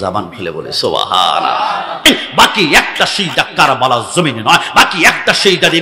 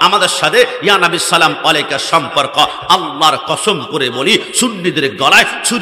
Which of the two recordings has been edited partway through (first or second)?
first